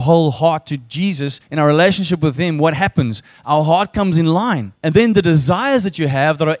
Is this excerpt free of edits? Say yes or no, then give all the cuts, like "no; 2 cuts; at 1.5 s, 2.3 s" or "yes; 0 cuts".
no; 2 cuts; at 1.4 s, 4.7 s